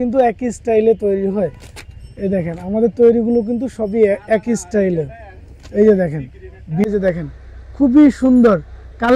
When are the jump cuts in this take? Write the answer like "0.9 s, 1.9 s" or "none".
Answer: 6.9 s